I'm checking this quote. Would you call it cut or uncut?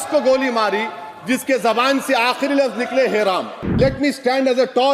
cut